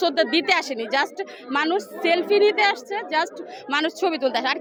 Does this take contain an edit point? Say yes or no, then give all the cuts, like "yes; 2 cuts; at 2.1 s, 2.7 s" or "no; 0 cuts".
no; 0 cuts